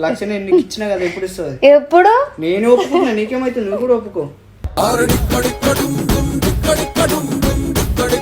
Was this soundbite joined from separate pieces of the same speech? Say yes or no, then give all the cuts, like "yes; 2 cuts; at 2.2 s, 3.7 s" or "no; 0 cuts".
no; 0 cuts